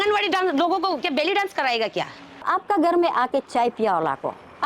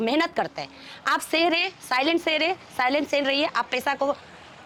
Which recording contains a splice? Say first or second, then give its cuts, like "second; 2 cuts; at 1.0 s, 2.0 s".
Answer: first; 1 cut; at 2.5 s